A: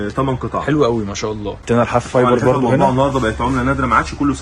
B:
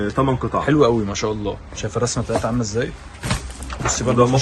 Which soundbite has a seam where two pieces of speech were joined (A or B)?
A